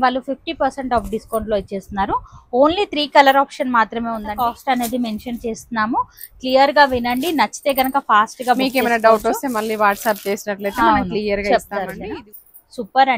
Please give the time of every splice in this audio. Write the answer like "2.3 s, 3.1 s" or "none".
4.3 s, 12.0 s